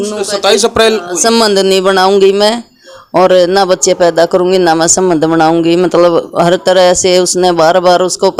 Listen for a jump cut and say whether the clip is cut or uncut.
uncut